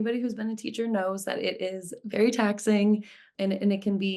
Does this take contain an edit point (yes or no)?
yes